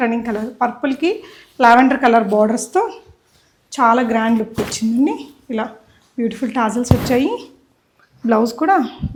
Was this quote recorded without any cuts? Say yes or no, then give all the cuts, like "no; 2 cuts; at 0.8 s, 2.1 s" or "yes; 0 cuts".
yes; 0 cuts